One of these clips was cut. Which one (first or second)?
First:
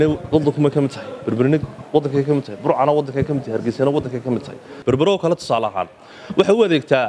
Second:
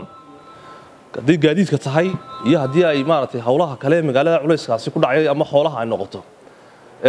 first